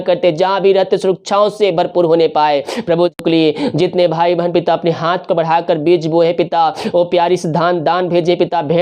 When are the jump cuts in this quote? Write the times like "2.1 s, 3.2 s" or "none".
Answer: 3.2 s